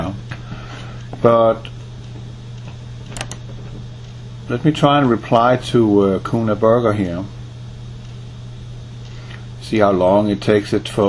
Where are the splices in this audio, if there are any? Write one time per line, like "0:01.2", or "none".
none